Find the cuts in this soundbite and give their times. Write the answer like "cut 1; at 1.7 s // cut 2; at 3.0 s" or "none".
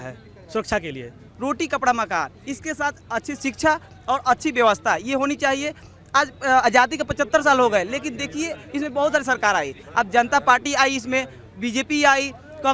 cut 1; at 1.1 s